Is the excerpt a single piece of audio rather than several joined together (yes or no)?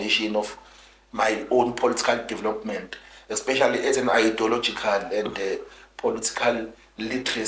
yes